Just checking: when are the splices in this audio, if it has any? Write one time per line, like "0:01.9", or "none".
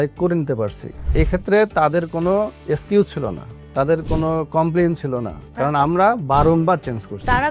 0:02.6
0:05.4